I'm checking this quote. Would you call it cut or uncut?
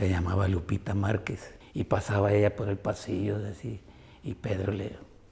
cut